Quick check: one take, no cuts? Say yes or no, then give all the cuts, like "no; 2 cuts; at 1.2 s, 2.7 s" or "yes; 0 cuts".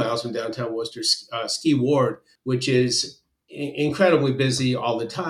no; 1 cut; at 2.3 s